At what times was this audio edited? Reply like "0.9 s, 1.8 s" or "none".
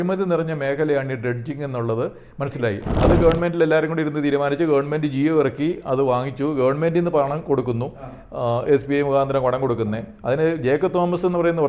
2.9 s